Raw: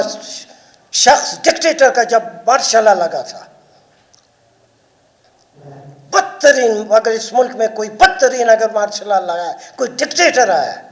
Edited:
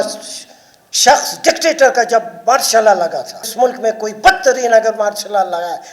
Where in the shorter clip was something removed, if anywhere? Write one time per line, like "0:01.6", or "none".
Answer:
0:03.5